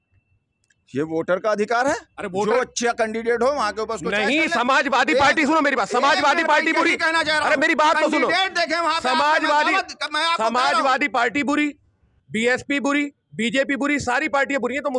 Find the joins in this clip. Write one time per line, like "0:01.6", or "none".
none